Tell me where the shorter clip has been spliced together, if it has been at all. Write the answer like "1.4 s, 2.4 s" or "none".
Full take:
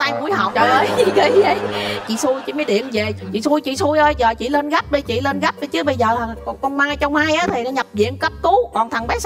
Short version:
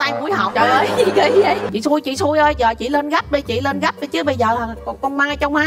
1.7 s